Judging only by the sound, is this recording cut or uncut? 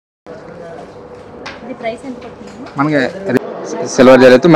cut